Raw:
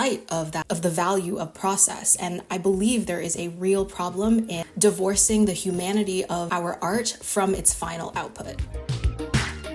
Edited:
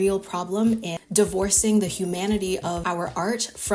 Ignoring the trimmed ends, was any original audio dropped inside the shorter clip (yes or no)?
no